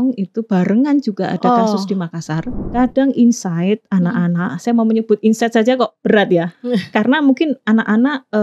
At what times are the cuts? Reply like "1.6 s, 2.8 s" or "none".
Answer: 2.6 s, 6.0 s